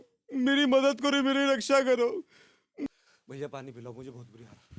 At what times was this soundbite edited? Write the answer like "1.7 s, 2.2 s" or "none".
2.7 s